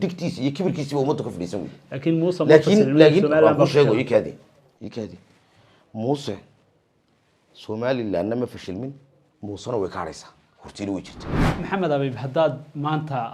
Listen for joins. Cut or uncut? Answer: cut